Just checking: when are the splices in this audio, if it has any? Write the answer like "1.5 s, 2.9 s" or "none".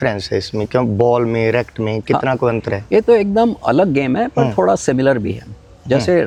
none